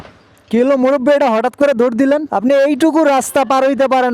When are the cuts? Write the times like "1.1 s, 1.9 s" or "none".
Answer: 2.3 s